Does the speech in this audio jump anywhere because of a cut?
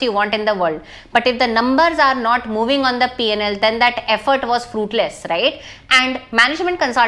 no; 0 cuts

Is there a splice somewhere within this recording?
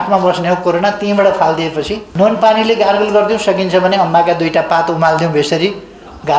yes; 1 cut; at 2.0 s

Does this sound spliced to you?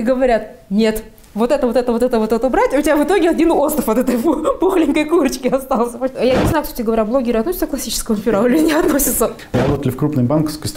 yes; 2 cuts; at 6.1 s, 9.3 s

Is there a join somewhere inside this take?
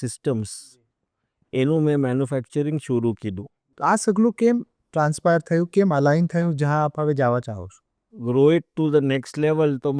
yes; 2 cuts; at 3.7 s, 8.1 s

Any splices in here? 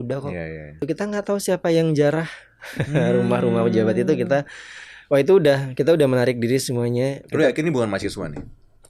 yes; 2 cuts; at 0.8 s, 7.2 s

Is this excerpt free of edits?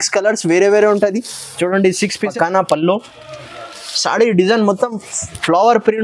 no; 1 cut; at 2.3 s

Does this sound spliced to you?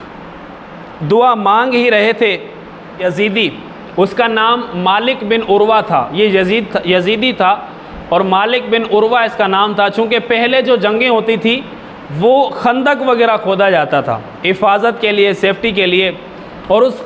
yes; 1 cut; at 3.0 s

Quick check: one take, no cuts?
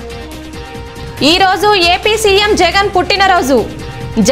yes; 0 cuts

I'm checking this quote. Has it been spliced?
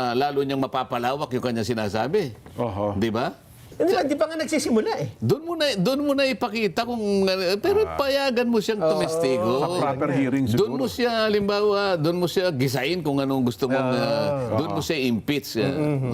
yes; 1 cut; at 3.6 s

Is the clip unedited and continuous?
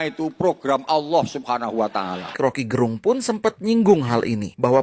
no; 1 cut; at 2.4 s

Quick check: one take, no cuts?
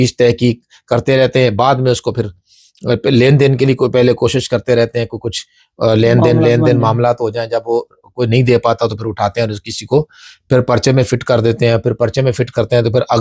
yes; 0 cuts

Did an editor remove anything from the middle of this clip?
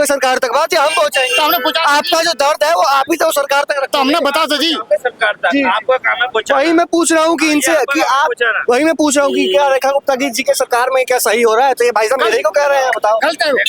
no; 0 cuts

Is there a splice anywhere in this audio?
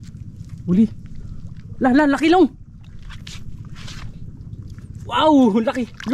no; 0 cuts

